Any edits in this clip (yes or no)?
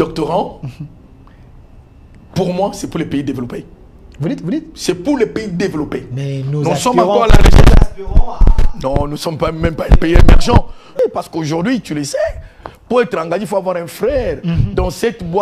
yes